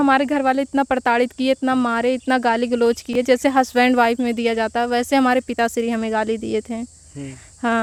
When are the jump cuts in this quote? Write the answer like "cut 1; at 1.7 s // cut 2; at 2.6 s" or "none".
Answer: none